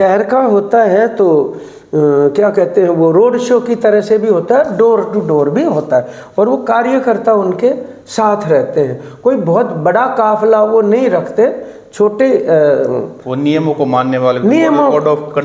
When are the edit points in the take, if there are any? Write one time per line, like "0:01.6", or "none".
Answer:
none